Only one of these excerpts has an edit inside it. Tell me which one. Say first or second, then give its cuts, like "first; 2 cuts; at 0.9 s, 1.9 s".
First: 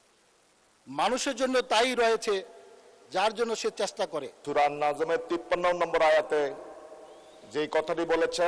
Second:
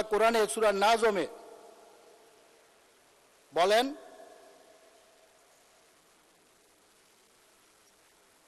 first; 1 cut; at 4.4 s